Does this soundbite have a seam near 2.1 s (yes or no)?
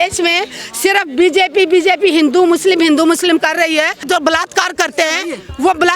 no